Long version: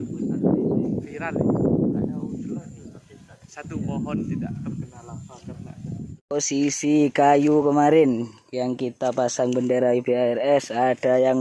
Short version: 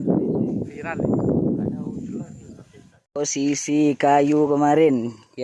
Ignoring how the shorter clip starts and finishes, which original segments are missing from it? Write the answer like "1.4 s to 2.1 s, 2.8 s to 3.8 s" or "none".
3.3 s to 6.1 s